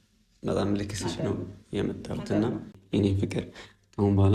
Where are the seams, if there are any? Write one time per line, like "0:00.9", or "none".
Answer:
0:02.8